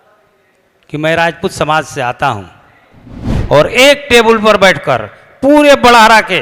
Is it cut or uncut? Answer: cut